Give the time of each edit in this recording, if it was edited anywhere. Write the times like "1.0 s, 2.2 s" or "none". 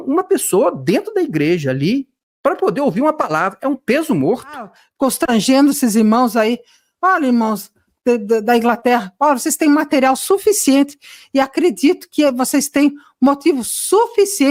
4.8 s

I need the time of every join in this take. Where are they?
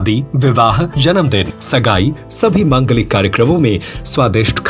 1.2 s

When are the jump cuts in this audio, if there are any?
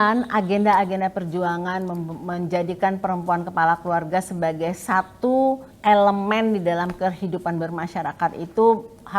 5.7 s

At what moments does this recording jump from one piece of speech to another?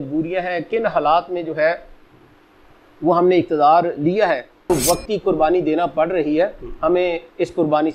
4.7 s

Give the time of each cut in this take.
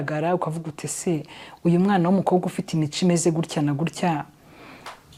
none

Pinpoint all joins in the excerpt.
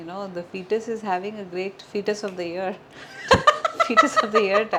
none

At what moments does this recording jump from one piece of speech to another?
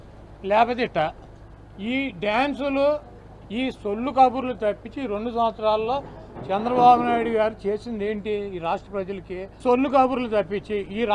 9.6 s

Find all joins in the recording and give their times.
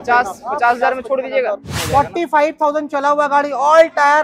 1.7 s

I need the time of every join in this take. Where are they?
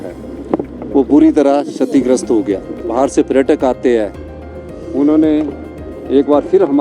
2.9 s

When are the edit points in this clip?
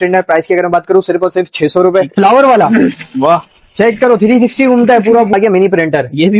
2.1 s, 5.3 s

